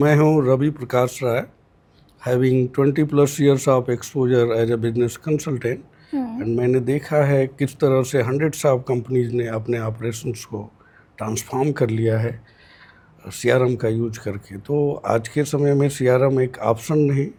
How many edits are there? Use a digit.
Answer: 0